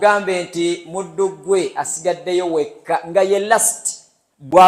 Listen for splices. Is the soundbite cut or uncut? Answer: uncut